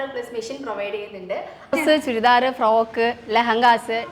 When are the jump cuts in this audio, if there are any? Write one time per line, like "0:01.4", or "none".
0:01.7